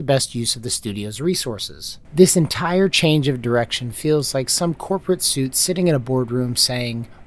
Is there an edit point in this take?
yes; 1 cut; at 2.0 s

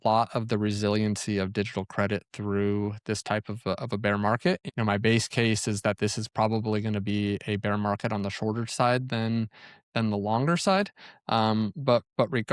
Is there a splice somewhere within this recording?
yes; 1 cut; at 4.6 s

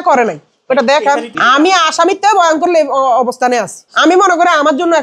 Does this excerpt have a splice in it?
yes; 1 cut; at 1.3 s

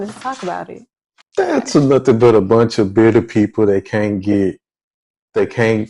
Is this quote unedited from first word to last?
no; 1 cut; at 1.1 s

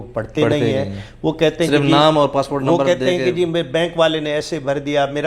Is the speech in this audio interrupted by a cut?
no; 0 cuts

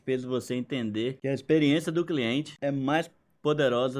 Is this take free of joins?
no; 2 cuts; at 1.2 s, 2.5 s

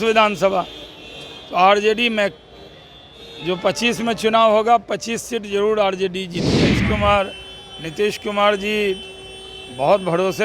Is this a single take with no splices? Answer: no; 1 cut; at 6.6 s

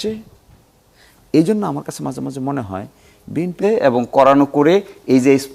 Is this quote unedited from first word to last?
no; 1 cut; at 3.6 s

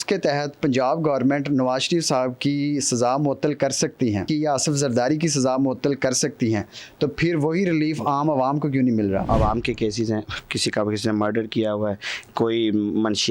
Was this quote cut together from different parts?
yes; 2 cuts; at 4.3 s, 9.3 s

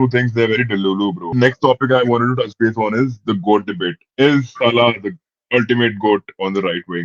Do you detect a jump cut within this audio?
yes; 1 cut; at 1.2 s

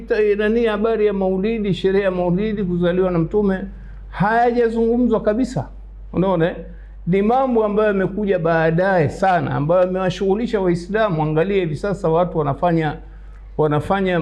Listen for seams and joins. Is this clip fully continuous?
yes; 0 cuts

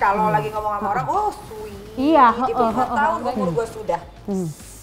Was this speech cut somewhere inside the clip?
yes; 1 cut; at 2.9 s

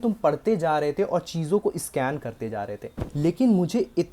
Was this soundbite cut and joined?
yes; 1 cut; at 3.0 s

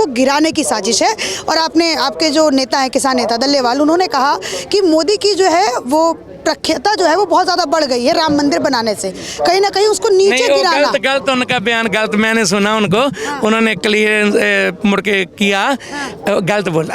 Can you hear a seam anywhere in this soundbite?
no; 0 cuts

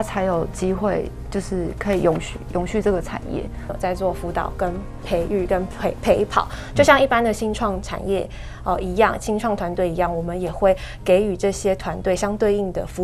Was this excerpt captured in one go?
no; 1 cut; at 3.7 s

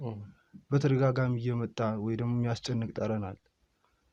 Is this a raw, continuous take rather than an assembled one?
yes; 0 cuts

